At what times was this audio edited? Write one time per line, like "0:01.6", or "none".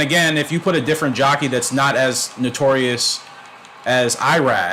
none